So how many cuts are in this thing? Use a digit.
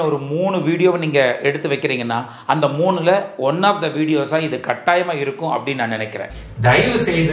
1